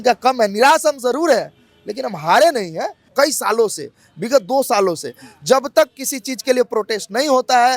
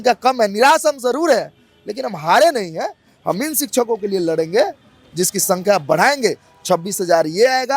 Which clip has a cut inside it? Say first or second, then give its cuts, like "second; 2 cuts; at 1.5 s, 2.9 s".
first; 1 cut; at 3.1 s